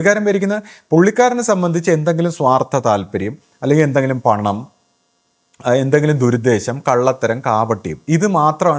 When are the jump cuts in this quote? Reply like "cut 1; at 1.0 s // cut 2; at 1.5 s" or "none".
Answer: none